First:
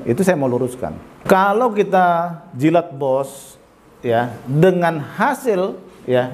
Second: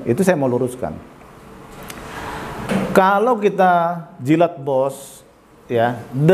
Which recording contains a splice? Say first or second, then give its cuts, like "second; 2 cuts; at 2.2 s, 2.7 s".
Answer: first; 1 cut; at 1.2 s